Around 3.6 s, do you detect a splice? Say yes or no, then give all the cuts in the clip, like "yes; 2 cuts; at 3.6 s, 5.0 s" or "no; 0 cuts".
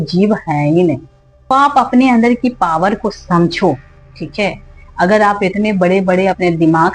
no; 1 cut; at 1.5 s